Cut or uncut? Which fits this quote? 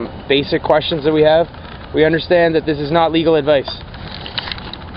cut